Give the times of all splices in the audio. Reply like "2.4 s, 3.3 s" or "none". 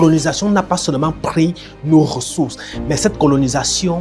none